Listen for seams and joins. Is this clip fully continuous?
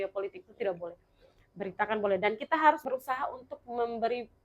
no; 1 cut; at 2.8 s

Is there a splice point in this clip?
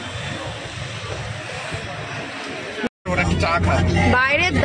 yes; 1 cut; at 2.9 s

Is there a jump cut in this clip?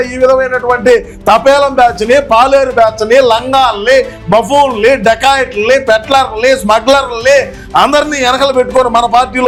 no; 0 cuts

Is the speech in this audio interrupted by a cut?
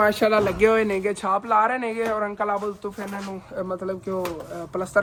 no; 0 cuts

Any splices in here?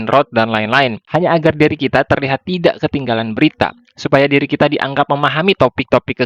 yes; 1 cut; at 1.0 s

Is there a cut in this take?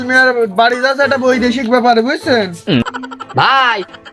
yes; 1 cut; at 2.8 s

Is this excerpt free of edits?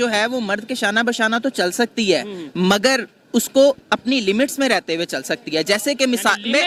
yes; 0 cuts

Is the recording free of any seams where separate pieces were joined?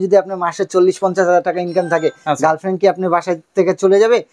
yes; 0 cuts

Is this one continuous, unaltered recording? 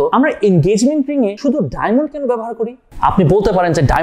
yes; 0 cuts

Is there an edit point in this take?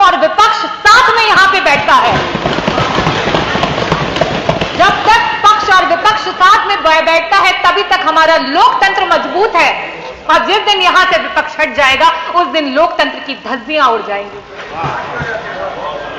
no; 0 cuts

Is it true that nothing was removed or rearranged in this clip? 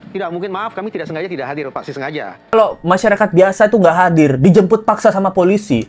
no; 1 cut; at 2.5 s

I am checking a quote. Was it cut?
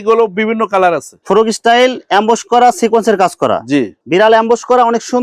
yes; 2 cuts; at 1.1 s, 4.0 s

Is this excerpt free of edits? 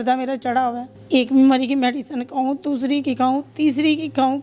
no; 1 cut; at 0.9 s

